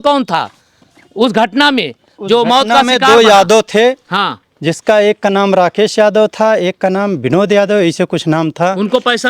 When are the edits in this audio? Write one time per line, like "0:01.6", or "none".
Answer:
none